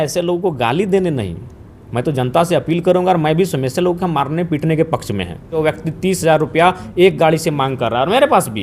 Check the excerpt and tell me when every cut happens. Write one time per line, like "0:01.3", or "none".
0:05.6